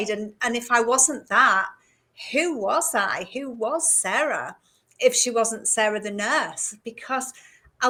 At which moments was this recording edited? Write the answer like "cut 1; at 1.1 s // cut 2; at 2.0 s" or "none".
none